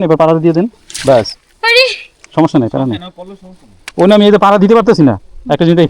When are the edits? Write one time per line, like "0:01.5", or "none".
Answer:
0:03.8